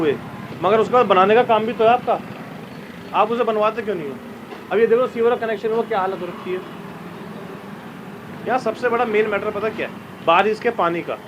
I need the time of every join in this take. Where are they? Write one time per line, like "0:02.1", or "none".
none